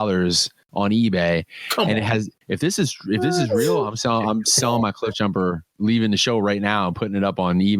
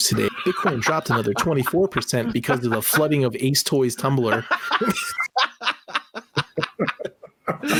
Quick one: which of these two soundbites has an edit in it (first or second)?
first